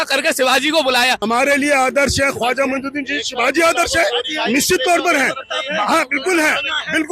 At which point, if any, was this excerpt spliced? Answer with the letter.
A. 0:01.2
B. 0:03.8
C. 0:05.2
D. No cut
A